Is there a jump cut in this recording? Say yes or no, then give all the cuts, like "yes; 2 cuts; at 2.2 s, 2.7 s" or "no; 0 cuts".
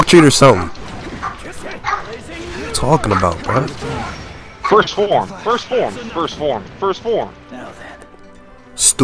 no; 0 cuts